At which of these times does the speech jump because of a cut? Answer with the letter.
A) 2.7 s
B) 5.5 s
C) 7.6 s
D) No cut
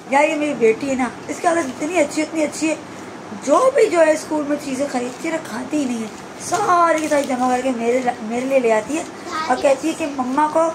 D